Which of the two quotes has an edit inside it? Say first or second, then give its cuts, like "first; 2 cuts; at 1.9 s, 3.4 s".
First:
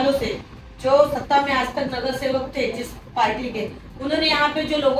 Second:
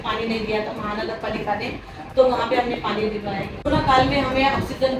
second; 1 cut; at 3.7 s